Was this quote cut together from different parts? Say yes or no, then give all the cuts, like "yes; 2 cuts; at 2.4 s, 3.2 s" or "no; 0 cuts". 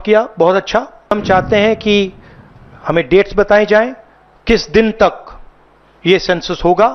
yes; 1 cut; at 1.1 s